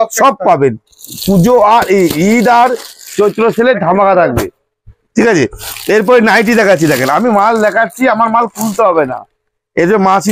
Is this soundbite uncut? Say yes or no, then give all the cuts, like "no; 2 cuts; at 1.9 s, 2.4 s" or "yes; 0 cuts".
yes; 0 cuts